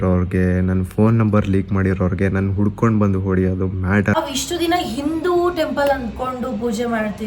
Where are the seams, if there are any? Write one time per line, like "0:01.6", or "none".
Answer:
0:04.2